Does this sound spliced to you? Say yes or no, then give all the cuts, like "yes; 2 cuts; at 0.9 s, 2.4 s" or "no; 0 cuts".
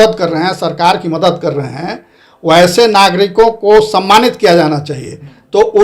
no; 0 cuts